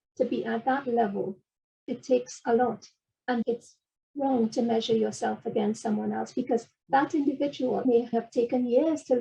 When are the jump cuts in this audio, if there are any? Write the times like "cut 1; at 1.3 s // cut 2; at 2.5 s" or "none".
cut 1; at 1.8 s // cut 2; at 3.4 s // cut 3; at 6.8 s // cut 4; at 8.1 s